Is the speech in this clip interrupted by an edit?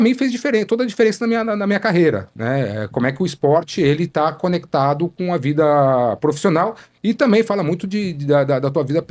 no; 0 cuts

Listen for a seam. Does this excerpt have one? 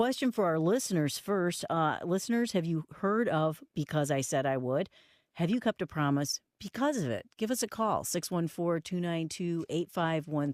yes; 1 cut; at 2.3 s

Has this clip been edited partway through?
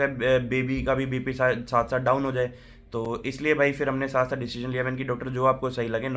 no; 0 cuts

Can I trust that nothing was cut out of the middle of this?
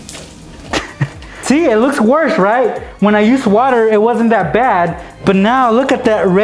no; 1 cut; at 1.4 s

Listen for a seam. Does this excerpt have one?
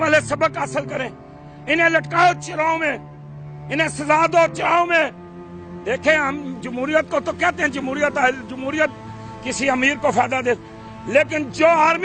no; 0 cuts

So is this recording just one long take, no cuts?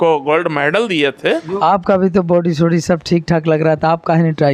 no; 1 cut; at 1.5 s

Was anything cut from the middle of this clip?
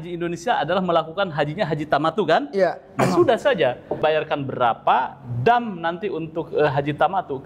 yes; 1 cut; at 3.9 s

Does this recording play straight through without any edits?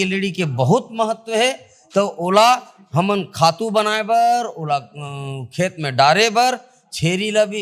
yes; 0 cuts

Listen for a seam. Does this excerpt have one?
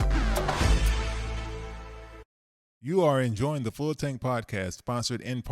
yes; 1 cut; at 2.3 s

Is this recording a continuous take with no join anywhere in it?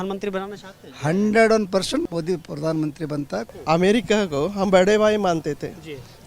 no; 2 cuts; at 2.0 s, 3.5 s

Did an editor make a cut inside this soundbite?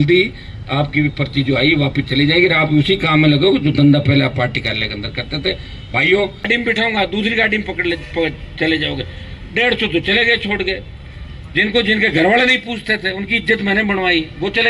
yes; 1 cut; at 6.5 s

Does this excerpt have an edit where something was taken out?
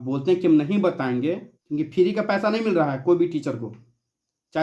yes; 1 cut; at 1.5 s

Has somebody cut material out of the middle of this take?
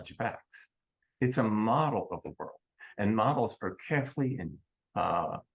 no; 0 cuts

